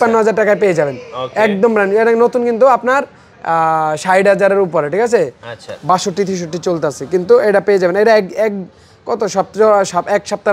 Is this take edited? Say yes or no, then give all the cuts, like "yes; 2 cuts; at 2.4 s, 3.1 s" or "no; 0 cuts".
no; 0 cuts